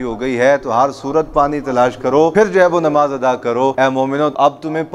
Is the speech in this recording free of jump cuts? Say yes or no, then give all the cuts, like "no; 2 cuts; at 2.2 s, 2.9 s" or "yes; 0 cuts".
no; 2 cuts; at 2.3 s, 4.0 s